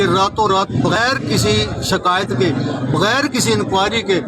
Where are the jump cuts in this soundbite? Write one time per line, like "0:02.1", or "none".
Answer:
0:00.9